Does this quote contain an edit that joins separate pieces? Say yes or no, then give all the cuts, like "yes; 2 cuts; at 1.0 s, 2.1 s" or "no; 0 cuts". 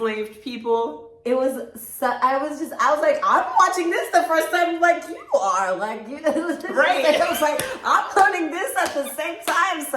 no; 0 cuts